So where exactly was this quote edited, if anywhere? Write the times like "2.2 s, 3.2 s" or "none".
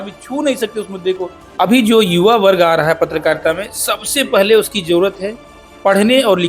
1.4 s